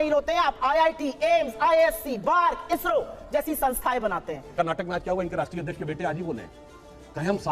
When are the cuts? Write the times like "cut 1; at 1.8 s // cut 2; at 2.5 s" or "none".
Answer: cut 1; at 4.6 s